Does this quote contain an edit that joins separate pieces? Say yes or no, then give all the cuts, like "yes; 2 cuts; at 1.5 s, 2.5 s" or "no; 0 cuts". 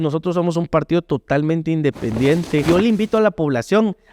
yes; 1 cut; at 2.6 s